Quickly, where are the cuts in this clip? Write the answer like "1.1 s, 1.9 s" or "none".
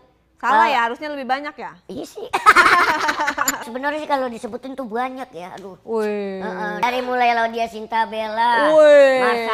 3.7 s, 6.8 s